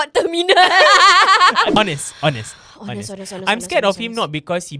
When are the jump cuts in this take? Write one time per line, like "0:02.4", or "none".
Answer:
0:01.7